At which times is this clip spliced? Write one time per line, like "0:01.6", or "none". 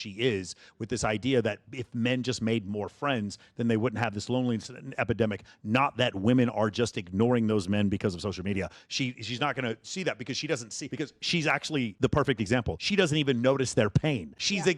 none